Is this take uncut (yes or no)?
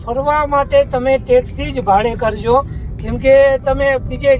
yes